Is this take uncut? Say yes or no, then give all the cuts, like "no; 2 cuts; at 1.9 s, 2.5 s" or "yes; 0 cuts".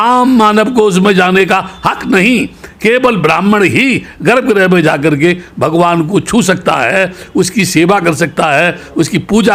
yes; 0 cuts